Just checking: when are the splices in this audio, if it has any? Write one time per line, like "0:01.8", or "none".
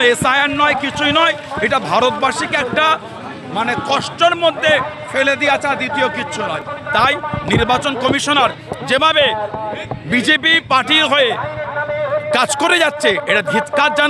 none